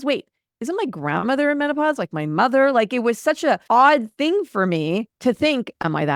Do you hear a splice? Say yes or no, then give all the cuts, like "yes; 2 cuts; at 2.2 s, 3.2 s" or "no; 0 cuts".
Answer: no; 0 cuts